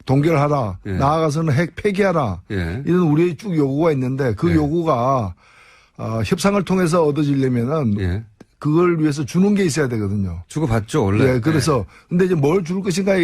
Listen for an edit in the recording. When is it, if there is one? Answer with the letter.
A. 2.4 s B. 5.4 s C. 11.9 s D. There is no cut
A